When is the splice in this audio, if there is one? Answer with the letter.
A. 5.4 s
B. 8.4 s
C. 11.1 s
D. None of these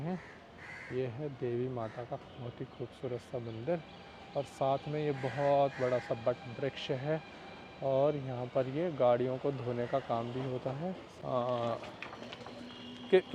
C